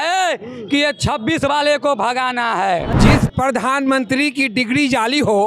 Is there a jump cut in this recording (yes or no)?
yes